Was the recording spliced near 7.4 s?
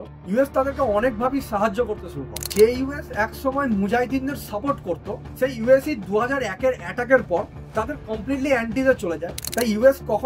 no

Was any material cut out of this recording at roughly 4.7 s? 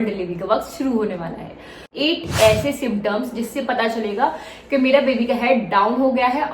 no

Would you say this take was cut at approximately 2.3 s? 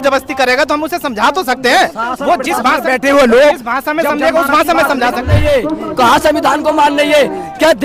no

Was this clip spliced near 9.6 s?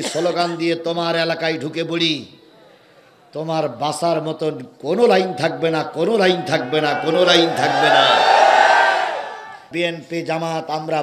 yes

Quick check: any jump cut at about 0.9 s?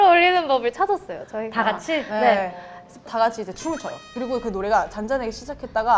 no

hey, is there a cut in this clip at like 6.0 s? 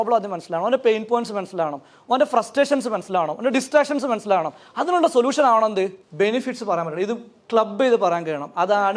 yes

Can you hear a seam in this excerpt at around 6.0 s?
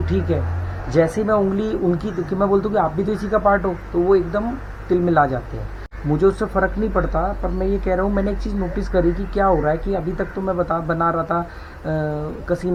no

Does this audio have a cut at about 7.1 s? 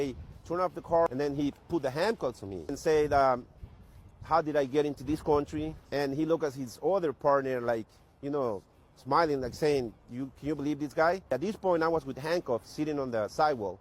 no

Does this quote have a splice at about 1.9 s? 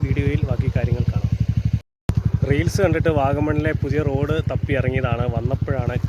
yes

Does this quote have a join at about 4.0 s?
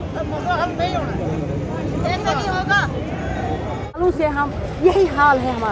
yes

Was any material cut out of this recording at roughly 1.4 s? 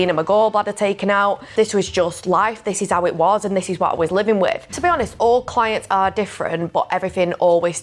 yes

